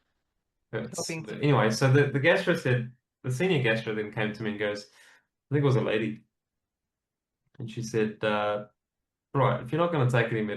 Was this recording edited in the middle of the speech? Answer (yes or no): yes